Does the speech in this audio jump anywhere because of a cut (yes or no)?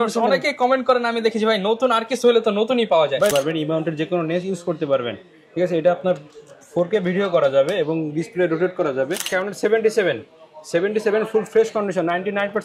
yes